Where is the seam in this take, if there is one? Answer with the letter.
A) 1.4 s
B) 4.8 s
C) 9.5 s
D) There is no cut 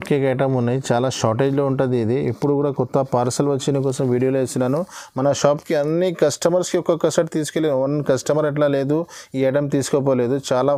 D